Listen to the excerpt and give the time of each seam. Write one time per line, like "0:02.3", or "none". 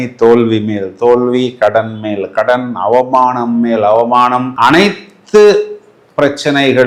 none